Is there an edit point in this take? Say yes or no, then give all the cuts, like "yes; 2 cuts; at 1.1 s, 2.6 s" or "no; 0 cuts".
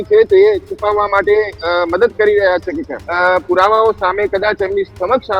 yes; 1 cut; at 3.0 s